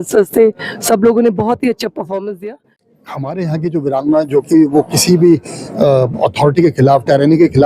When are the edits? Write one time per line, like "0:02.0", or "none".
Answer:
0:02.8